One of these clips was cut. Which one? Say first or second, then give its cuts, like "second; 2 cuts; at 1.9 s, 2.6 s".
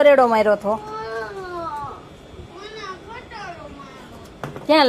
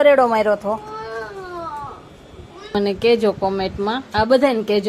second; 1 cut; at 2.7 s